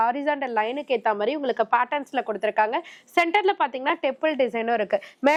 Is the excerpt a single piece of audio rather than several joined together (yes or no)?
yes